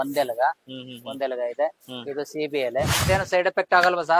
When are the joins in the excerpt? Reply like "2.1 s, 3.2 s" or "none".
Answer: 3.0 s